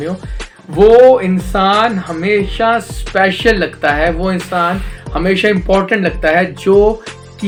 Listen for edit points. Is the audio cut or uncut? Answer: uncut